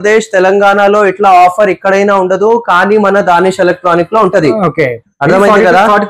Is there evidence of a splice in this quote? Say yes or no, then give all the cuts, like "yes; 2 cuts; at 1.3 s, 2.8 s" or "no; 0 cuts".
no; 0 cuts